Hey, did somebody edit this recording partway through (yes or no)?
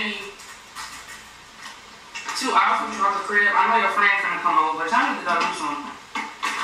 no